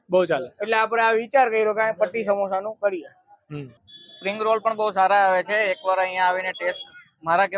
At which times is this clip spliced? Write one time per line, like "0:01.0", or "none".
0:03.7